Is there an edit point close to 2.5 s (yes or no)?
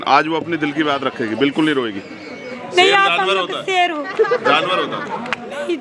yes